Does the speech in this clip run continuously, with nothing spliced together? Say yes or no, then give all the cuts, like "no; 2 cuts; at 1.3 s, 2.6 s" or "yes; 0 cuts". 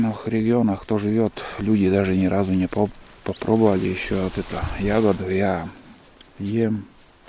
yes; 0 cuts